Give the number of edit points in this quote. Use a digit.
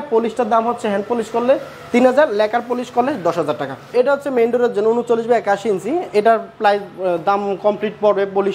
1